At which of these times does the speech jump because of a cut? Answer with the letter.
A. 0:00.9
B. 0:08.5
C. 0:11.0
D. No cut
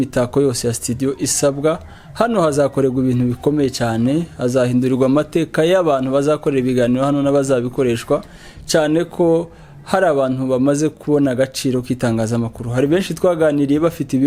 D